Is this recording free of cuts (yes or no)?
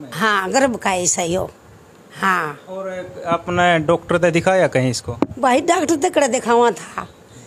yes